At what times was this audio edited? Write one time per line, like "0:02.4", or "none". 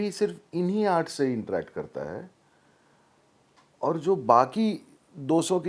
none